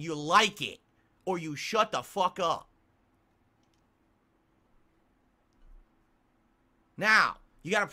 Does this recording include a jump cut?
no; 0 cuts

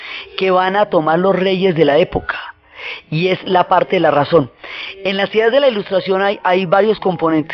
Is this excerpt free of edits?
no; 1 cut; at 4.7 s

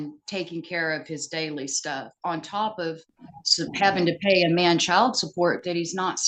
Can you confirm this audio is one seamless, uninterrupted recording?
yes; 0 cuts

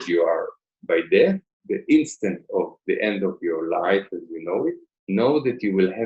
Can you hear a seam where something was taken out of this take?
yes; 2 cuts; at 1.5 s, 4.9 s

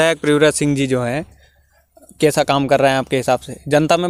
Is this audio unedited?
yes; 0 cuts

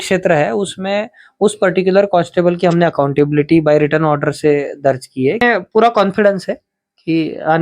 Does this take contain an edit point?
yes; 1 cut; at 5.4 s

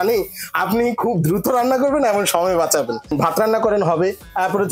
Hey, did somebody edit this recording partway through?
yes; 1 cut; at 3.1 s

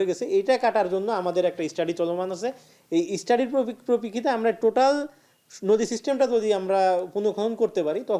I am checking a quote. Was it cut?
no; 0 cuts

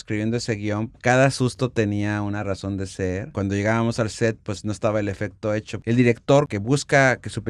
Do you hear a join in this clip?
yes; 3 cuts; at 3.3 s, 5.8 s, 6.5 s

